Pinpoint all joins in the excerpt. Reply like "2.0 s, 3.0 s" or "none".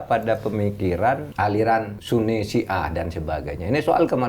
1.3 s, 2.0 s